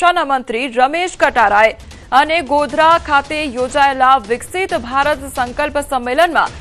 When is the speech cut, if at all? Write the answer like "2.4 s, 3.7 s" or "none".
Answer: 5.1 s